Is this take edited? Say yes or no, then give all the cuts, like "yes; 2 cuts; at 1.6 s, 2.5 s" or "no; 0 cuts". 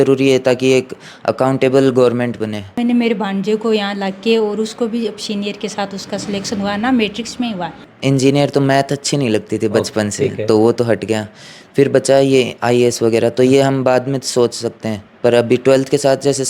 yes; 2 cuts; at 2.8 s, 7.8 s